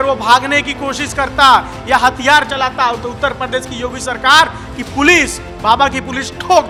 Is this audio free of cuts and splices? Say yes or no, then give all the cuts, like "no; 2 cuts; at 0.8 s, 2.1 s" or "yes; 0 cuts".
yes; 0 cuts